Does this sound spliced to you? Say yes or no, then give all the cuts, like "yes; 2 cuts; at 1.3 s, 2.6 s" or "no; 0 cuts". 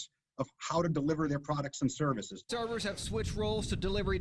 yes; 1 cut; at 2.6 s